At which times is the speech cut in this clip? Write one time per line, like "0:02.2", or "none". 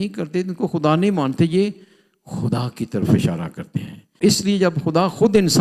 0:04.2